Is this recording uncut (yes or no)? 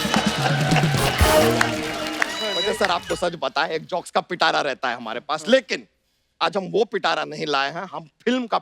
no